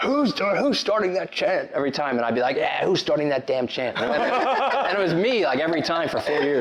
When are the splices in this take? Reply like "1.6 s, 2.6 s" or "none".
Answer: none